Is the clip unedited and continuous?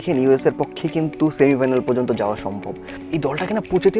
no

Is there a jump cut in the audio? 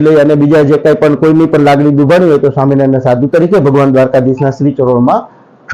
no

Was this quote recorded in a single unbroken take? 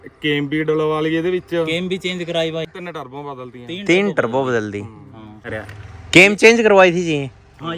no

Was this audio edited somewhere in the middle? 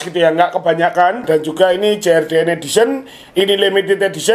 yes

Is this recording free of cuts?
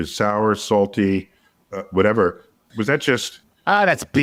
yes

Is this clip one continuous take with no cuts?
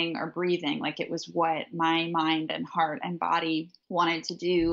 no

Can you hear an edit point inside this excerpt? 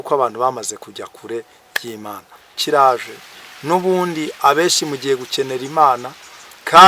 yes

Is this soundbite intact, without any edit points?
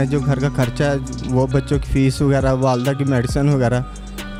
yes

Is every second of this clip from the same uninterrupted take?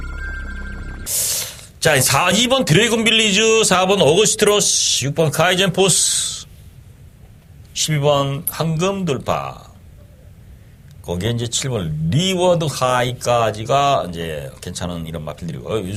yes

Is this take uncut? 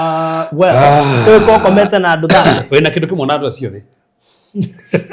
yes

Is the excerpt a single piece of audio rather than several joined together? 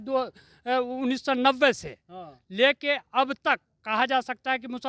yes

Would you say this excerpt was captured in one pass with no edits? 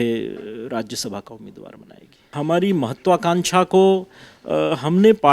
no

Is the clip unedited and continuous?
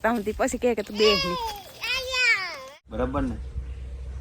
no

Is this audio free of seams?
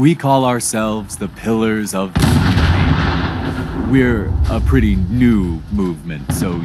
yes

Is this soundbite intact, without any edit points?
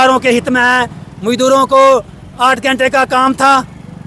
yes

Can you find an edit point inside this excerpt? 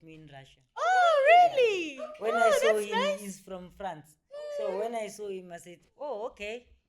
no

